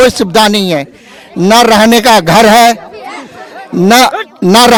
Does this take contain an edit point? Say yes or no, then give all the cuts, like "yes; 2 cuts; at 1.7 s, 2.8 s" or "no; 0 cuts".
no; 0 cuts